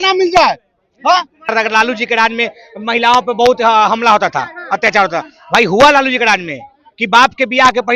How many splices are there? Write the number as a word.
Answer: one